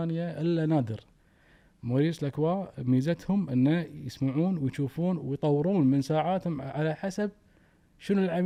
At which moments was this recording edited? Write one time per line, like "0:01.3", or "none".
none